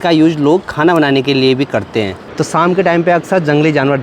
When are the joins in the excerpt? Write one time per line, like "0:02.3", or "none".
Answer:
0:02.2